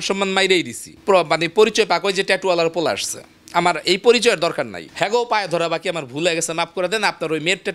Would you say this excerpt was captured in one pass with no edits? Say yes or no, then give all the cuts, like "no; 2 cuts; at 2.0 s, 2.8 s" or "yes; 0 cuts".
no; 2 cuts; at 1.0 s, 4.8 s